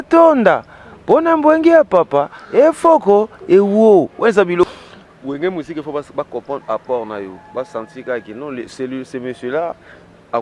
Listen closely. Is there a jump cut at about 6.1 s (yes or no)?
no